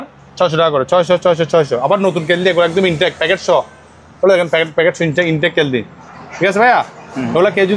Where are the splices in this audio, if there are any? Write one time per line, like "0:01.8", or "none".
none